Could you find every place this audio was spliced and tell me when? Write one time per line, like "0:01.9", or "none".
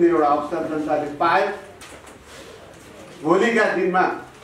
none